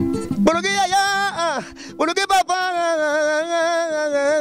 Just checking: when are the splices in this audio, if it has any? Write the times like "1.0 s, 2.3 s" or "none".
none